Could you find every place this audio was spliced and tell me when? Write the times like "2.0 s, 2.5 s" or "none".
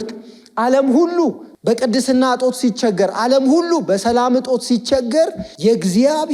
1.5 s, 5.4 s